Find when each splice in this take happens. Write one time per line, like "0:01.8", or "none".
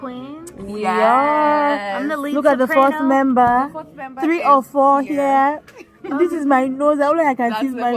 none